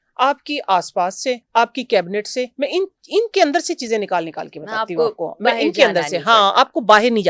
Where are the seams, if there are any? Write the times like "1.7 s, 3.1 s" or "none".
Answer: none